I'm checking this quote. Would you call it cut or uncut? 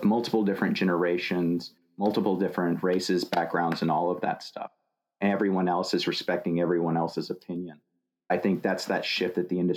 uncut